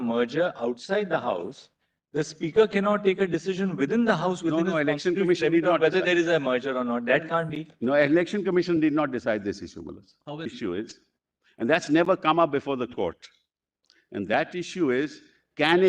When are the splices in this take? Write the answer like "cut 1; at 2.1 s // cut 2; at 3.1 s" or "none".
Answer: cut 1; at 10.5 s